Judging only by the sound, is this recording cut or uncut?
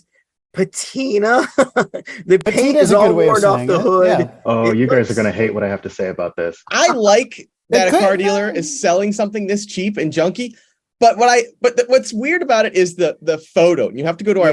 cut